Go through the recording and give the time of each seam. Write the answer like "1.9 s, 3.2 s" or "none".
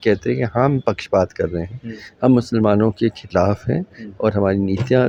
none

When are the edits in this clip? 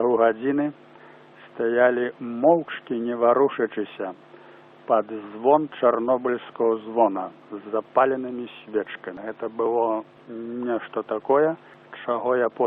none

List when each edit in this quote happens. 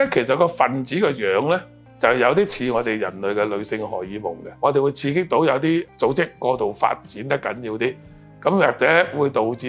4.5 s, 5.9 s

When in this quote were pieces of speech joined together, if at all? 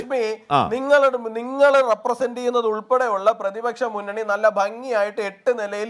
none

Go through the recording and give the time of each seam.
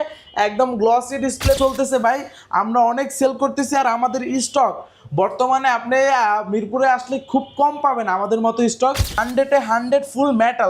1.6 s, 9.2 s

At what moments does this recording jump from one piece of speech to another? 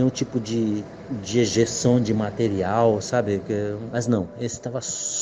3.9 s

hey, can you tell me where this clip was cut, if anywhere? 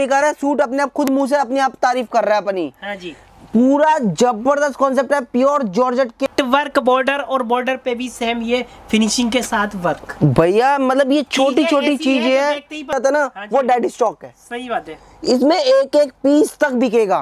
6.2 s, 13.0 s

